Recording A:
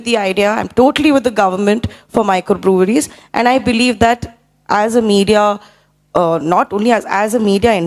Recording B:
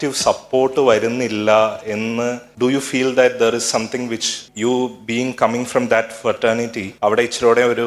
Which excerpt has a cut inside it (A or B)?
B